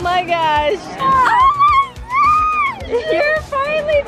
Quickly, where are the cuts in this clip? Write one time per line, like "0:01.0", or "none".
0:00.9